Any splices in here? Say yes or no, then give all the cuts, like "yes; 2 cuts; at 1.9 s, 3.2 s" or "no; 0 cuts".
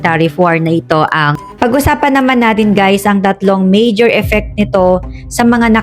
yes; 1 cut; at 1.4 s